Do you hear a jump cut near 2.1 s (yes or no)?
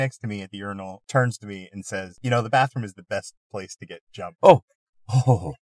yes